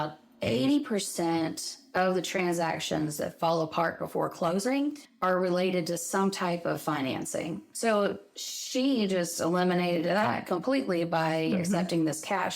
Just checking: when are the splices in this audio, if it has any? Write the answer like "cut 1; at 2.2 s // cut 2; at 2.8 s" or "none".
cut 1; at 5.1 s